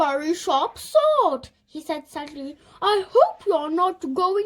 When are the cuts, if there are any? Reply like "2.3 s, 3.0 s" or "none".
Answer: none